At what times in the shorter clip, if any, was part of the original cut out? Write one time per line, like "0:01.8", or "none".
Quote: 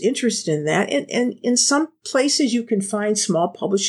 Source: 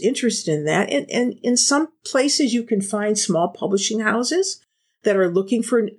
none